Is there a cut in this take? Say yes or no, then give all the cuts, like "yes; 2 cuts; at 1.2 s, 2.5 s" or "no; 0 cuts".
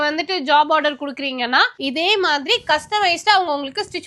yes; 1 cut; at 1.7 s